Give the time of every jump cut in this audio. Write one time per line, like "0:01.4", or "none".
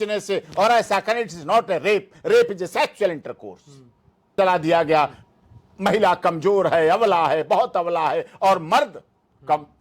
0:04.3